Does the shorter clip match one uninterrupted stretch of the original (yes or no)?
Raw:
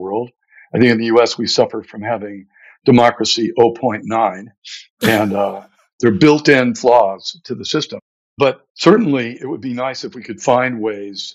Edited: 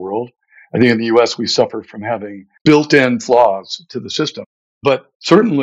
no